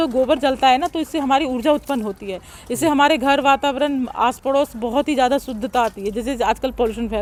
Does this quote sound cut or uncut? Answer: uncut